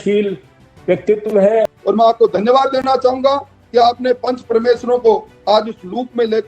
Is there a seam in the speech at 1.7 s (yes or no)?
yes